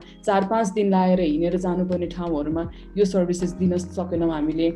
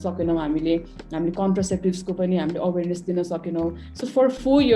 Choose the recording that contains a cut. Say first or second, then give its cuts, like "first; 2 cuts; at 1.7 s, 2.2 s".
second; 1 cut; at 3.9 s